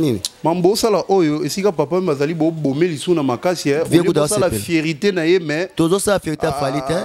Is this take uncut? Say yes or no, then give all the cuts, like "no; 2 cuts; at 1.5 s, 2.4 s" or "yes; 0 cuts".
yes; 0 cuts